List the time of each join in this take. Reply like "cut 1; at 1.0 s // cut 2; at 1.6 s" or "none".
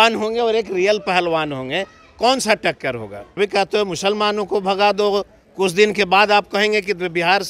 cut 1; at 3.2 s

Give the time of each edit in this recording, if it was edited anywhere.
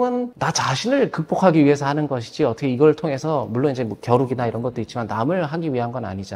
none

